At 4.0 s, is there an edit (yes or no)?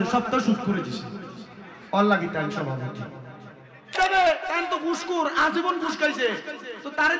yes